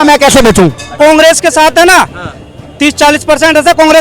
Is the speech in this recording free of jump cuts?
no; 1 cut; at 0.9 s

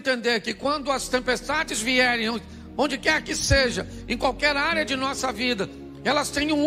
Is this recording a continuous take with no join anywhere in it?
yes; 0 cuts

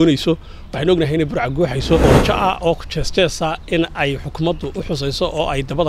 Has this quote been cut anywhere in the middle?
yes; 1 cut; at 2.0 s

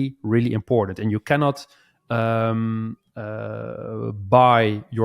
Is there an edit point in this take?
no; 0 cuts

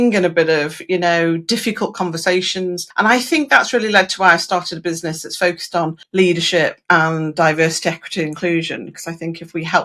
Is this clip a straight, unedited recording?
no; 2 cuts; at 2.8 s, 6.0 s

